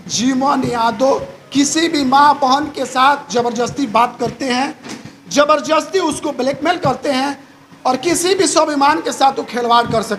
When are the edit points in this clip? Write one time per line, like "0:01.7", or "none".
none